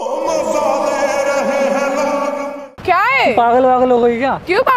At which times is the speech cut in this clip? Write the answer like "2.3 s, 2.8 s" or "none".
2.6 s